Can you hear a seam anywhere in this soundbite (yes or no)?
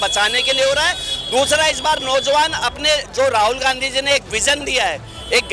no